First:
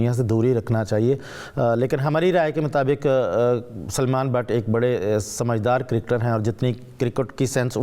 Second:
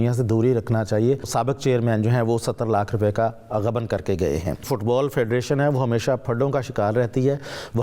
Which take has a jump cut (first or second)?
second